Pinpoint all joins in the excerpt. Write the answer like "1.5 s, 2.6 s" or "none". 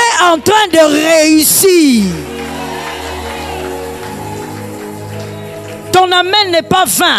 none